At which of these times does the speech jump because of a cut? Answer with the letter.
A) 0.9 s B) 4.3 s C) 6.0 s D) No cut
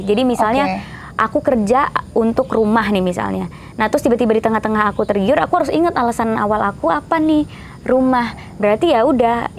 D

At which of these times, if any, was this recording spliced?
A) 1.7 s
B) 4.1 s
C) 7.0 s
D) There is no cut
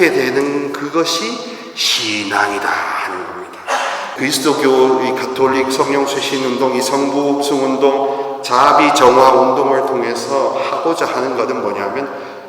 B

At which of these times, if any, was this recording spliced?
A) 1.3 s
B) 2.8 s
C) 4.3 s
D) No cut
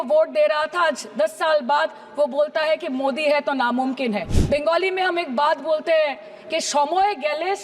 C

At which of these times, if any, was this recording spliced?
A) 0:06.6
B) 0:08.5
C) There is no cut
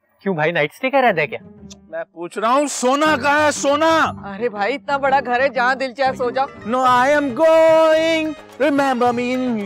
A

